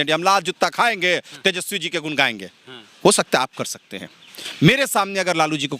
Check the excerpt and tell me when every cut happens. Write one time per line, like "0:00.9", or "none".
none